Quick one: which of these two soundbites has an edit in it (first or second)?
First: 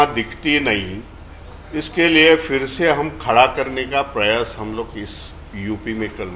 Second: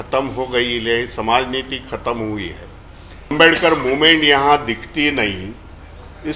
second